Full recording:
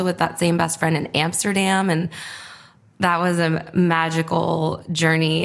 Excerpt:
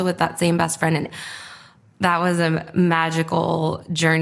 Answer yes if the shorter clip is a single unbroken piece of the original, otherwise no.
no